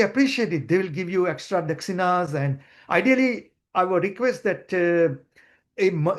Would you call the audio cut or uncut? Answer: uncut